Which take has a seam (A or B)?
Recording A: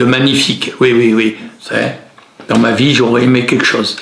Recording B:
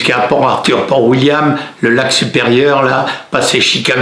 A